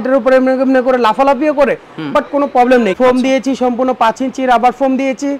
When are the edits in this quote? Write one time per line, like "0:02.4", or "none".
0:02.9